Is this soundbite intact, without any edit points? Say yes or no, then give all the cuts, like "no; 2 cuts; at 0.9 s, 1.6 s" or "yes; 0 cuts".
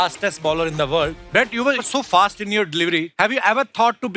no; 2 cuts; at 1.2 s, 3.1 s